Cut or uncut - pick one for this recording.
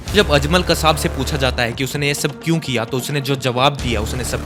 uncut